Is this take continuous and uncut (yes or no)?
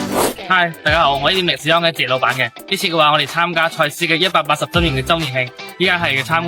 yes